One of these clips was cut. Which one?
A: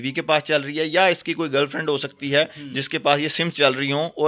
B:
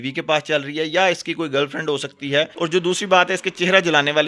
B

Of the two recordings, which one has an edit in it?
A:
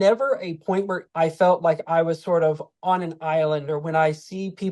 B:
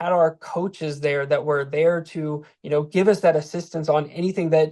A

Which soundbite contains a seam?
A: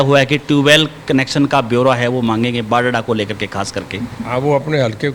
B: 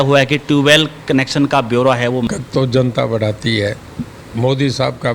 B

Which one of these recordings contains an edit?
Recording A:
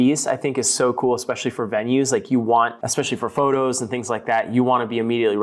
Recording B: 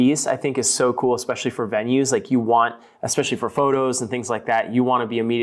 A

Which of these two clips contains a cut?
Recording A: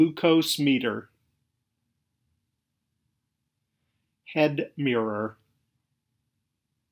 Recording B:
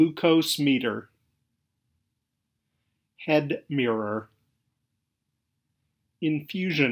B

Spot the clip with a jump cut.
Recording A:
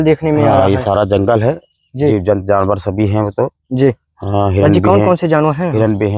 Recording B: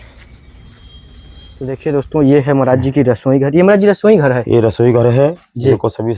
B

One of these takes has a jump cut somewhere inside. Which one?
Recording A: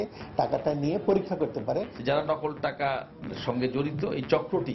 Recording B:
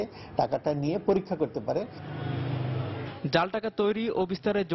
A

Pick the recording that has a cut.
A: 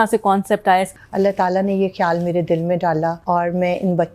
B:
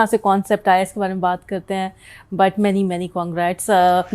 A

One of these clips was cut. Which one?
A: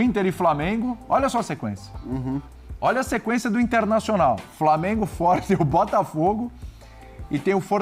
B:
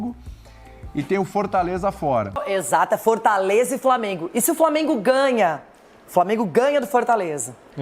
B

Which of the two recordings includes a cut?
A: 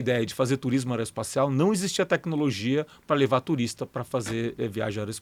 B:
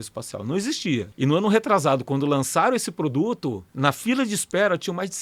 B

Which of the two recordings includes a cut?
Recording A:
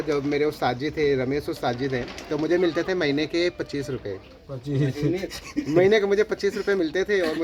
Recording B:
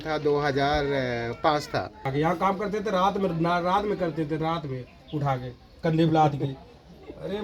B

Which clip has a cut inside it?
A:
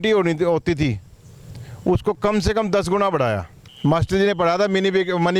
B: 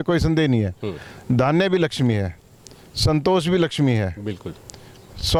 A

